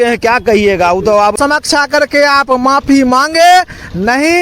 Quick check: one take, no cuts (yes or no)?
no